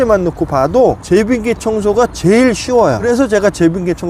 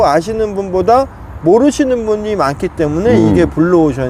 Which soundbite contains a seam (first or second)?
first